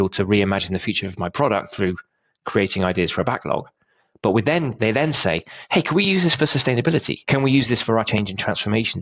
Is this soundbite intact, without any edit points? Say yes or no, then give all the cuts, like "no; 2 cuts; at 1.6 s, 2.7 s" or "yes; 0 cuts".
no; 2 cuts; at 7.2 s, 8.1 s